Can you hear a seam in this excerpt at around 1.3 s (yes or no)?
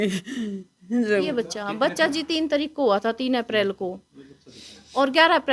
yes